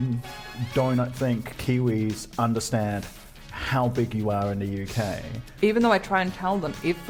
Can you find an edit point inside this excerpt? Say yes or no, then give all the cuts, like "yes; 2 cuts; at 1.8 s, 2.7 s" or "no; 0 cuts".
no; 0 cuts